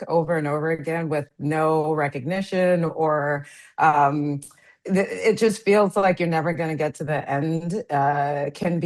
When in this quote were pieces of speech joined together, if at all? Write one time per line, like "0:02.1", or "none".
none